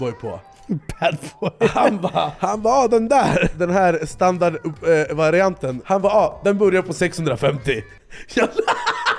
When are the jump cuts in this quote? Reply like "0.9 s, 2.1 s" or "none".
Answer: 2.3 s, 3.5 s, 5.7 s